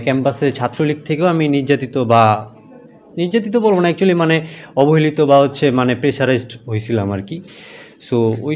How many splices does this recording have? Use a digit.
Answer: 0